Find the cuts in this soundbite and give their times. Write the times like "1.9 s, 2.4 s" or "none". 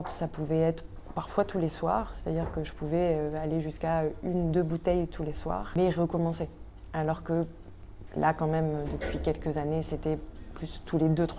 5.7 s